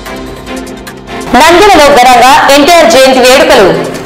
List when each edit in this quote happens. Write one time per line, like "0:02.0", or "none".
0:01.2